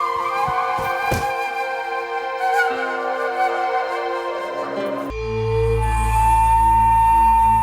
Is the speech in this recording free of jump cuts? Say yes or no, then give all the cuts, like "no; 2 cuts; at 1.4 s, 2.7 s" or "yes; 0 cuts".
no; 1 cut; at 5.1 s